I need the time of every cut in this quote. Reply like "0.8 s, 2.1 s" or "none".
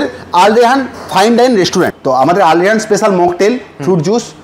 2.0 s